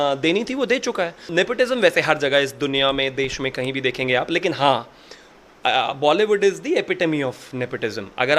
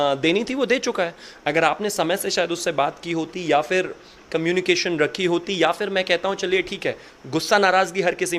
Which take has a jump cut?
first; 1 cut; at 1.3 s

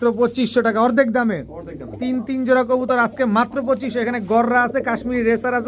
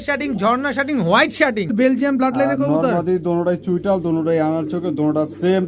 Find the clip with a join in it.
second; 1 cut; at 1.7 s

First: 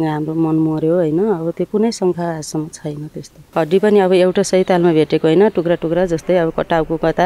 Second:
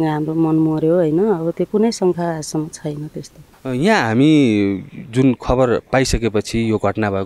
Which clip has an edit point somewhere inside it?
first; 1 cut; at 3.4 s

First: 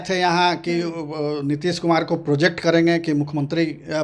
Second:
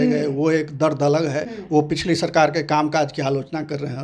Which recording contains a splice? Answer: second; 1 cut; at 1.5 s

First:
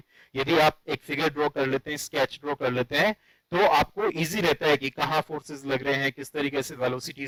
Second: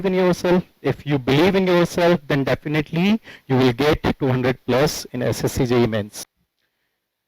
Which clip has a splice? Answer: second; 1 cut; at 6.3 s

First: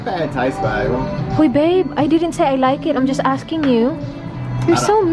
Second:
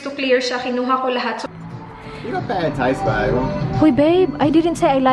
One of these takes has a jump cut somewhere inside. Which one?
second; 1 cut; at 1.4 s

